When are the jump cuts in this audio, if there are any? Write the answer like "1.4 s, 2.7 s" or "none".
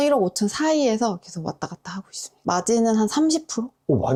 none